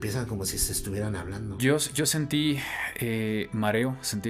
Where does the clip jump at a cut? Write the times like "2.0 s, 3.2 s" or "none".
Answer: 1.6 s